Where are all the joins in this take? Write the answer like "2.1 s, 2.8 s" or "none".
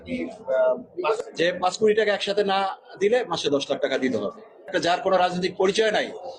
4.7 s

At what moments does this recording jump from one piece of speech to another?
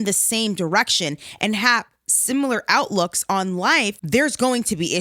4.0 s

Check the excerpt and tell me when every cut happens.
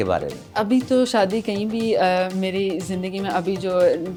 none

